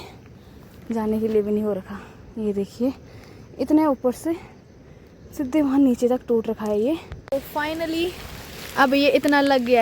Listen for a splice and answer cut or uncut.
cut